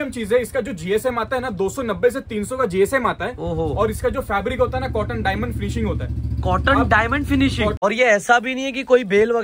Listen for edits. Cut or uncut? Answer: cut